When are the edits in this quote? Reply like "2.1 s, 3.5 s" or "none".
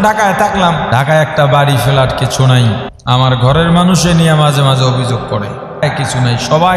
0.9 s, 2.9 s, 5.8 s